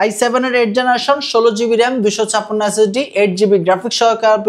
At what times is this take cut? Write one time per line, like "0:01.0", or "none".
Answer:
none